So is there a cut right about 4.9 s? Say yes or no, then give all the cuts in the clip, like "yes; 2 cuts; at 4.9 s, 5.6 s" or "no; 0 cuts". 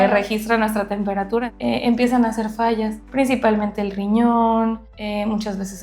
yes; 3 cuts; at 1.4 s, 3.0 s, 4.9 s